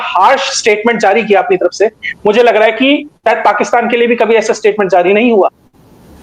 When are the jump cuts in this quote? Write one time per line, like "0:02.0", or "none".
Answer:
none